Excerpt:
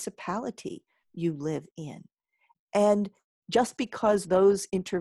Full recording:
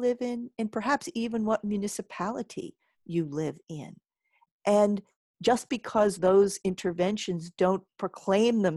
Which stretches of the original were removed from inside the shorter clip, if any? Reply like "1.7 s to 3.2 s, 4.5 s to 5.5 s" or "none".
none